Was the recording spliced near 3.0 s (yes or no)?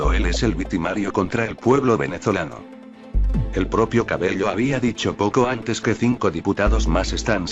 yes